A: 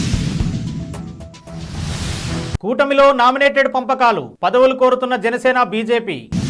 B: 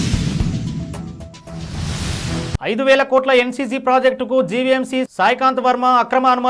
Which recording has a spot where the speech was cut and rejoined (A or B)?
B